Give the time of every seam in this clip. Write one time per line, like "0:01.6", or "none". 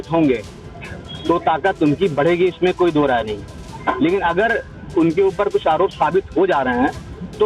none